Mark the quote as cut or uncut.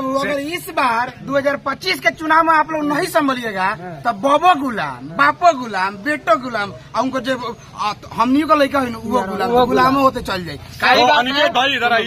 uncut